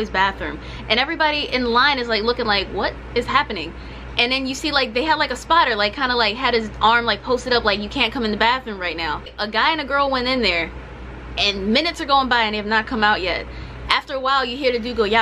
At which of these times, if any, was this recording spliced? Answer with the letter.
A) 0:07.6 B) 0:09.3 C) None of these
B